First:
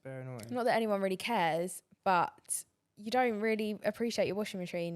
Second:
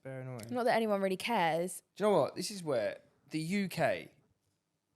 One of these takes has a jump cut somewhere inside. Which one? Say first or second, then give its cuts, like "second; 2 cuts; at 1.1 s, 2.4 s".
second; 1 cut; at 1.8 s